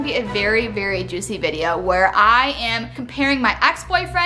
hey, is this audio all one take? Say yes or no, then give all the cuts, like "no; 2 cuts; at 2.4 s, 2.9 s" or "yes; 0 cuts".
yes; 0 cuts